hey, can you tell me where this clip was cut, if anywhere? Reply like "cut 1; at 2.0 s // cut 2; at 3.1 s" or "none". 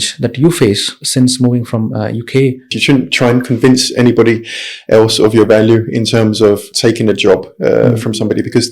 cut 1; at 0.9 s // cut 2; at 2.8 s // cut 3; at 6.7 s